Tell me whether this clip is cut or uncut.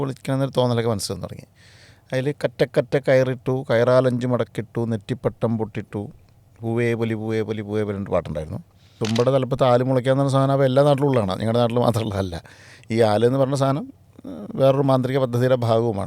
cut